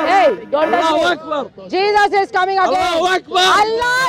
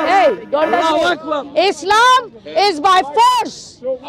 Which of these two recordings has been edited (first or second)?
second